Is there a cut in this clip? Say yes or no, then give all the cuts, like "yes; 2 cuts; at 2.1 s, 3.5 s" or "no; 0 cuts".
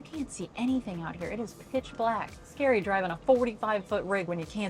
yes; 1 cut; at 2.4 s